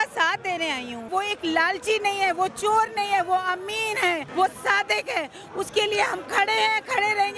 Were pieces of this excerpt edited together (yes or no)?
yes